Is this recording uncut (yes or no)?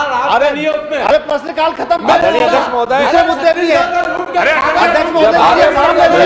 yes